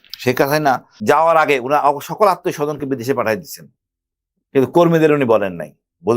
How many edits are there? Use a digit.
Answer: 1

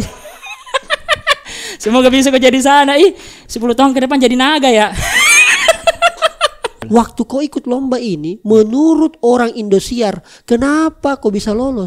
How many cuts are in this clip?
1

